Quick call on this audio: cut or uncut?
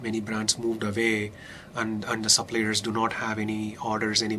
uncut